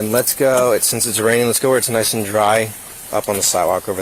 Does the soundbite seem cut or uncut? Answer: uncut